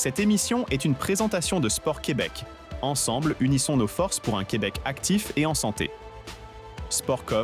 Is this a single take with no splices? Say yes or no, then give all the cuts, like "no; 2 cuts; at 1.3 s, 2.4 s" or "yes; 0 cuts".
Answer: yes; 0 cuts